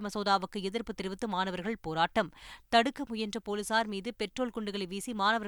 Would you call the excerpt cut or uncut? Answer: uncut